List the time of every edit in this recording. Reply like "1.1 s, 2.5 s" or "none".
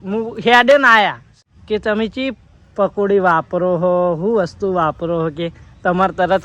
1.3 s

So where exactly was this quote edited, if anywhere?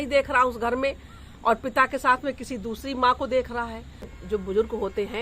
4.2 s

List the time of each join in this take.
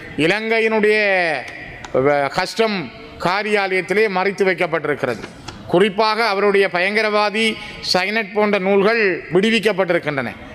none

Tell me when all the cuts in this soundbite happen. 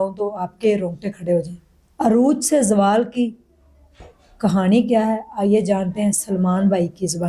none

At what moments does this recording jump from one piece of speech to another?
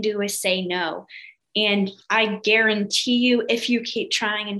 none

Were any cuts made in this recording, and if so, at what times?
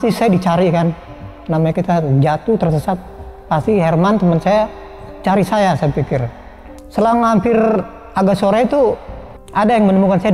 none

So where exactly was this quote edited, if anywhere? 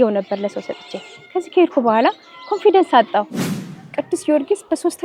3.5 s

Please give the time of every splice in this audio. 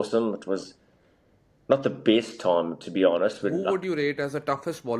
3.6 s

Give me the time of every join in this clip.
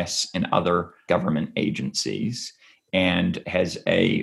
1.0 s, 3.4 s

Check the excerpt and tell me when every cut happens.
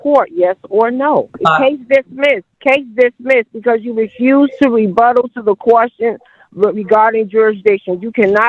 1.3 s, 2.5 s

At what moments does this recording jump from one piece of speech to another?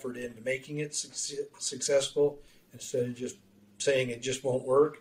none

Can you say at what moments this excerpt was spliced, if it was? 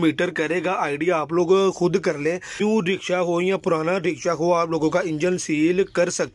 2.5 s

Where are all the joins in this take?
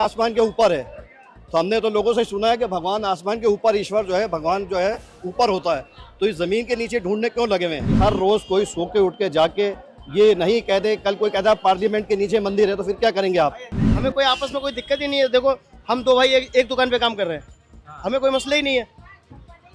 8.0 s, 13.8 s

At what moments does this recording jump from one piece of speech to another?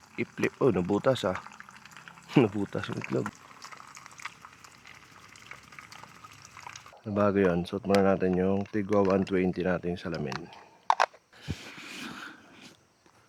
3.3 s, 6.9 s, 11.3 s

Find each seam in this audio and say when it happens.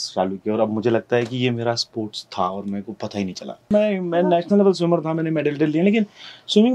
3.7 s

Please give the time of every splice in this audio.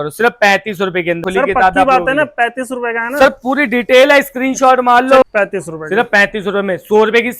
1.2 s, 5.2 s

